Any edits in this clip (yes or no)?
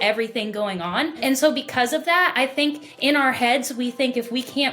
yes